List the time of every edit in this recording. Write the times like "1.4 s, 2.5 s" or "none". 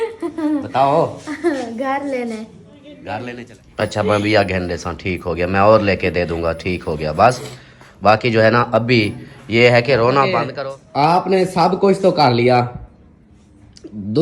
3.2 s, 10.4 s